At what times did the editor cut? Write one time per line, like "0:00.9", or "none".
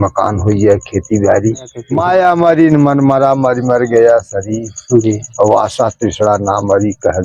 0:01.8